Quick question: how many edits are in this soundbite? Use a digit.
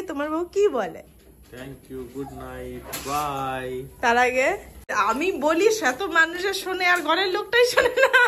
1